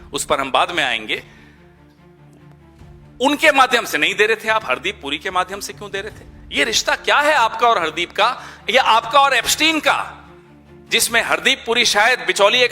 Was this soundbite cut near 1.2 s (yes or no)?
yes